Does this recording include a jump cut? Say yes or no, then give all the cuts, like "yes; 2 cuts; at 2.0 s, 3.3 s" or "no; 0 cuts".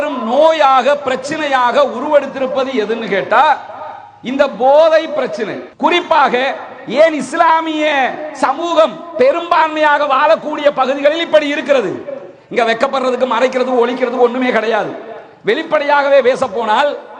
yes; 1 cut; at 5.6 s